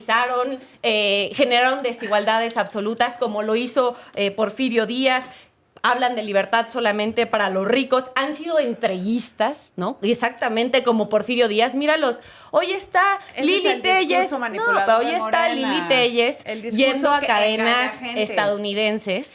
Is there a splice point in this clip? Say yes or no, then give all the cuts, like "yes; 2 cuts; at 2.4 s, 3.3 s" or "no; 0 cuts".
no; 0 cuts